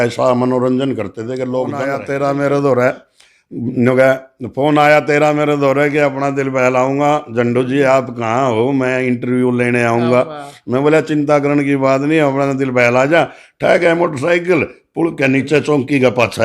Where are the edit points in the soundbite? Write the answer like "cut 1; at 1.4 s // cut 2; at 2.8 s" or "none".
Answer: cut 1; at 1.9 s